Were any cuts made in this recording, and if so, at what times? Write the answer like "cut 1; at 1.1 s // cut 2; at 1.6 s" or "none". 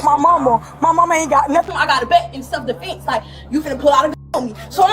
cut 1; at 1.7 s